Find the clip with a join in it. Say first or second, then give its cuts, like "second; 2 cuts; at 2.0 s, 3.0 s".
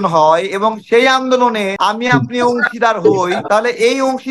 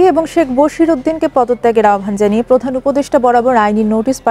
first; 2 cuts; at 1.7 s, 3.4 s